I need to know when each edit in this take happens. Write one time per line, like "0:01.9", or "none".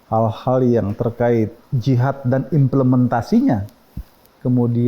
0:01.7